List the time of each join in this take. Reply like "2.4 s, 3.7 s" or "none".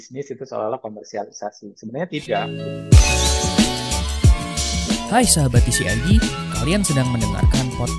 2.5 s